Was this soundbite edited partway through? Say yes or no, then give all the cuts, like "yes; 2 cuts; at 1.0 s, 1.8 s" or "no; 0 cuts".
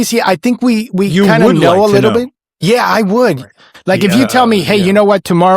yes; 1 cut; at 3.4 s